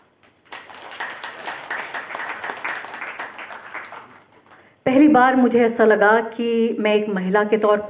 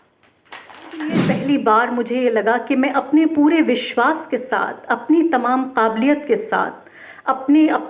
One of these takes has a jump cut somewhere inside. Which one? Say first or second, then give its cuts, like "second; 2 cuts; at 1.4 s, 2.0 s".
second; 1 cut; at 1.0 s